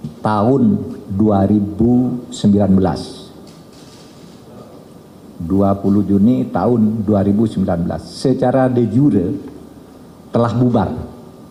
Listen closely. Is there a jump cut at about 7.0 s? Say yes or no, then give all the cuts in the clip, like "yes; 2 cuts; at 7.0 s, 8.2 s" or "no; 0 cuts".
no; 0 cuts